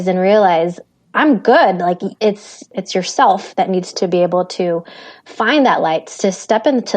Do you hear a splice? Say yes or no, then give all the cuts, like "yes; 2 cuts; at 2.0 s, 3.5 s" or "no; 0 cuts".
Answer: yes; 1 cut; at 2.7 s